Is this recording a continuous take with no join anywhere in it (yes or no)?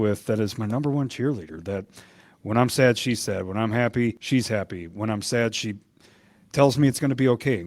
no